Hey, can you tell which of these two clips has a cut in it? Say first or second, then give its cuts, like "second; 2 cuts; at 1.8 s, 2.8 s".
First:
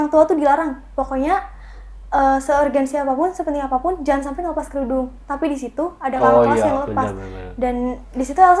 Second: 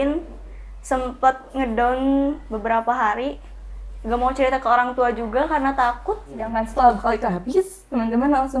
second; 1 cut; at 6.5 s